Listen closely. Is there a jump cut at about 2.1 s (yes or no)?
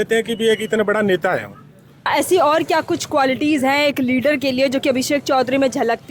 yes